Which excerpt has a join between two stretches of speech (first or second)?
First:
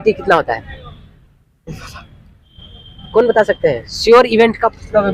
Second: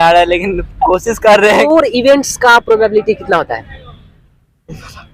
second